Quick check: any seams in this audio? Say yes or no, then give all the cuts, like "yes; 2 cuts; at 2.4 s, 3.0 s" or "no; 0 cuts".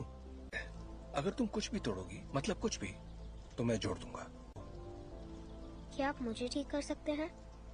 no; 0 cuts